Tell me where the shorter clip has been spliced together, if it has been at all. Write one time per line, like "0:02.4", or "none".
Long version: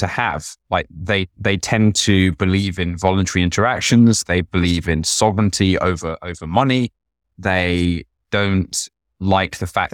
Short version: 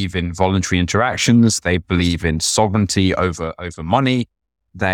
none